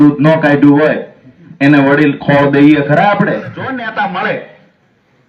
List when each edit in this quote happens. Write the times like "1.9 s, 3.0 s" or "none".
3.8 s